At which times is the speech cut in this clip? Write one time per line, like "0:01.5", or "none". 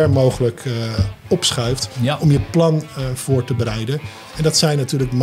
0:01.9